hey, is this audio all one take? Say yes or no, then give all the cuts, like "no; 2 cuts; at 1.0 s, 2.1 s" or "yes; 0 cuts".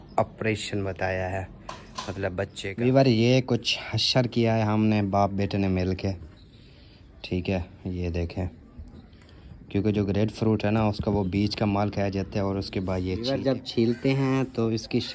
no; 2 cuts; at 2.7 s, 13.2 s